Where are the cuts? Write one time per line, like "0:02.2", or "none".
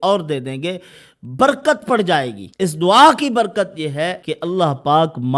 0:02.4
0:04.2